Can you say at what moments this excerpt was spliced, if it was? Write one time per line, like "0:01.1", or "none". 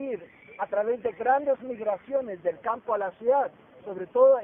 none